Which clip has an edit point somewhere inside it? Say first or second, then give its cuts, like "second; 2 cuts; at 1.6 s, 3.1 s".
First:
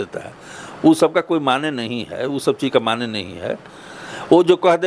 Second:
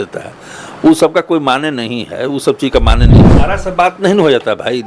second; 1 cut; at 3.3 s